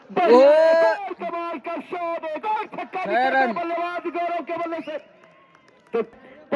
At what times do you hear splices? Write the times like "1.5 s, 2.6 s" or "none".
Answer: none